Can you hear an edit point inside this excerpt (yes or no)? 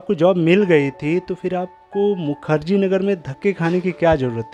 no